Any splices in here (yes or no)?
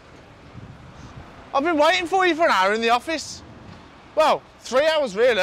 no